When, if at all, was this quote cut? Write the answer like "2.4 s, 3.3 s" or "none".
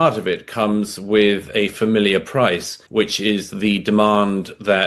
2.7 s